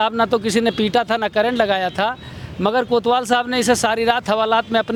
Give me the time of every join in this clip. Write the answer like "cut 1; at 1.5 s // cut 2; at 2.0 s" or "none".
none